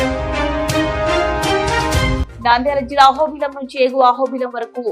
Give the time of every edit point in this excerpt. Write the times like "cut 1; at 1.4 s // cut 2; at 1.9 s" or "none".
cut 1; at 2.2 s